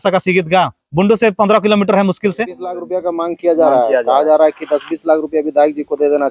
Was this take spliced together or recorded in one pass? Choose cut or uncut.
cut